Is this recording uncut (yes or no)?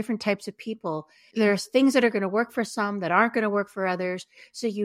no